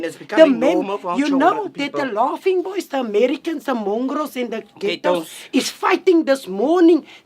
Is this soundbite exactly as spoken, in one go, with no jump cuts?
no; 1 cut; at 4.7 s

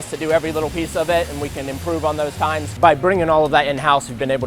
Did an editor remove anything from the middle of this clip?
yes; 1 cut; at 2.7 s

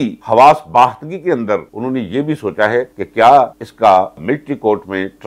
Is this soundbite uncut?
no; 1 cut; at 4.2 s

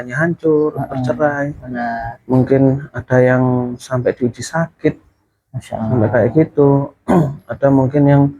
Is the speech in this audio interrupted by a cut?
no; 0 cuts

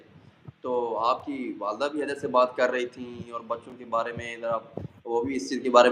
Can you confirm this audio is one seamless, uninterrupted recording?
yes; 0 cuts

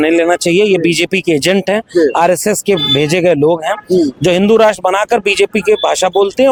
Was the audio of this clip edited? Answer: no; 0 cuts

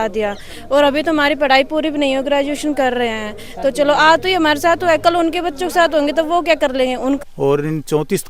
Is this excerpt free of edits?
no; 1 cut; at 7.3 s

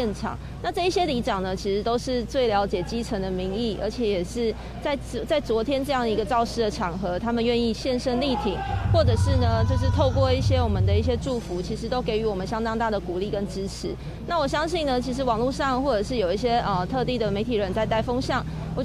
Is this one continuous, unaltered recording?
yes; 0 cuts

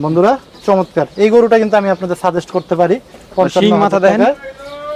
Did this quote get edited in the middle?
no; 0 cuts

